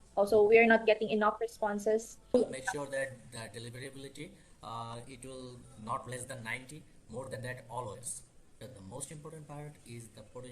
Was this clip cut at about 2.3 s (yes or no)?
yes